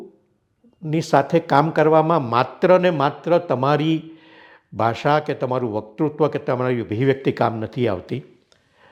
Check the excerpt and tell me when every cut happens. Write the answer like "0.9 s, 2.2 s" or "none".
none